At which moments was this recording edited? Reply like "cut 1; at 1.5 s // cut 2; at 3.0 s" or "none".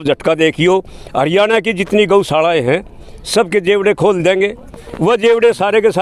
none